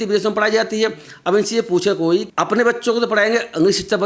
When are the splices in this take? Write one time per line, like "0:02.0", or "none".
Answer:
0:02.3

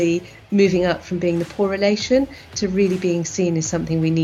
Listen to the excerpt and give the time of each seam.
none

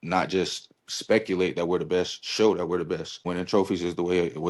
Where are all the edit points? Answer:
0:03.2

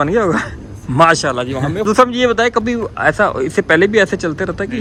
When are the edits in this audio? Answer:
none

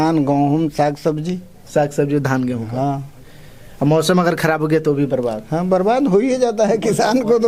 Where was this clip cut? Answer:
none

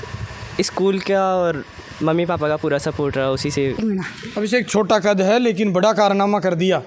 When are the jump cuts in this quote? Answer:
0:03.8

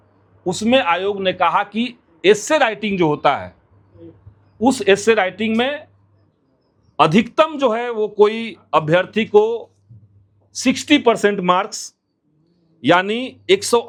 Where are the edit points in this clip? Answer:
none

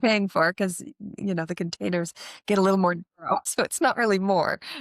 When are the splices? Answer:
0:03.5

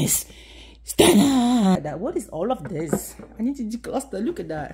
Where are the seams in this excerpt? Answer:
0:01.8

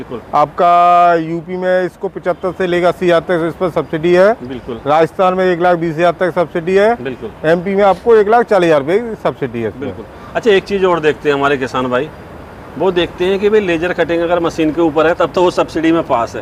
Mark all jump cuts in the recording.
none

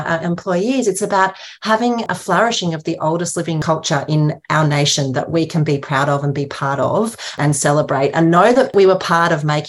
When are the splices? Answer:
0:02.1
0:03.6
0:07.4
0:08.7

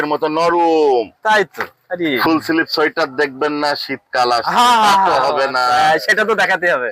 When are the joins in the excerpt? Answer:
0:02.1

